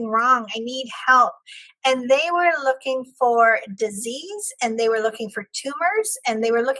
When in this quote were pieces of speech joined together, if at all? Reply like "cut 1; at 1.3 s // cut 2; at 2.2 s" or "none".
none